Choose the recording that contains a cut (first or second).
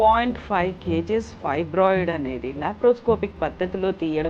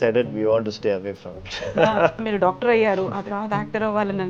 second